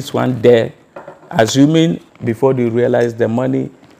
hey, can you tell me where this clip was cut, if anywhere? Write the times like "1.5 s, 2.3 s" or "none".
2.1 s